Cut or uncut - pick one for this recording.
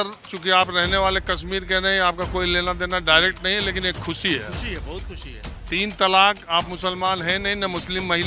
uncut